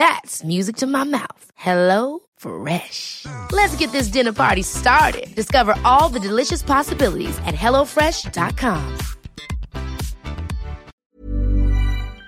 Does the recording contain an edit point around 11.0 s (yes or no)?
yes